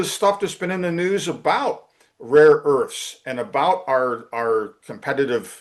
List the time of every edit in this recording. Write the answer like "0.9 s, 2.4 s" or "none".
none